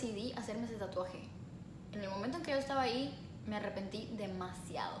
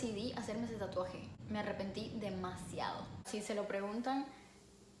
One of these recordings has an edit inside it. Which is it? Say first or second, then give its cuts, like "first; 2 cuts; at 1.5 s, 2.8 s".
second; 2 cuts; at 1.3 s, 3.3 s